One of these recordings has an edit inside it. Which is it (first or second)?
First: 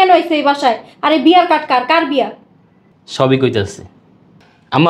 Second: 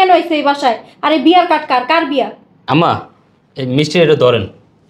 second